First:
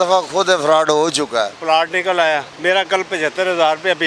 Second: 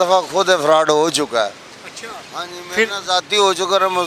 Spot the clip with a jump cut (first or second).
first